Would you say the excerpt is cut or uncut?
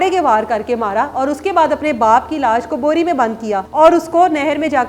cut